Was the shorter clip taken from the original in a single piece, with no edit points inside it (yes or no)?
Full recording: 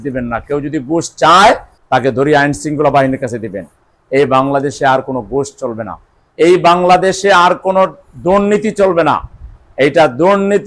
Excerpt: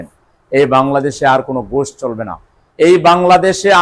yes